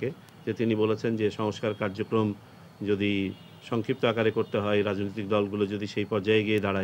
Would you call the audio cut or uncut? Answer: uncut